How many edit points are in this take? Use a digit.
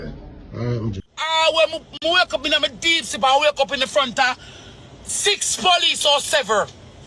1